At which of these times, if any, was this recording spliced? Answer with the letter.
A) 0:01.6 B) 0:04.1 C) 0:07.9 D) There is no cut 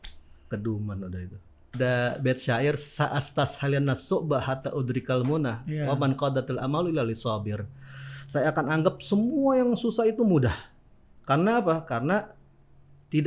A